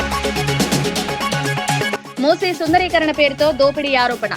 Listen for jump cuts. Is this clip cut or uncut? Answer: cut